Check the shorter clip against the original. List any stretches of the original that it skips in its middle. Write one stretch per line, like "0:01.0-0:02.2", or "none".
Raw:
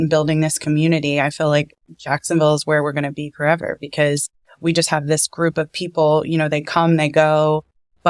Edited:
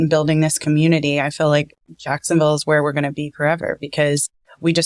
none